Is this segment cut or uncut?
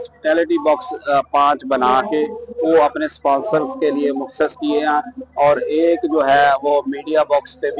uncut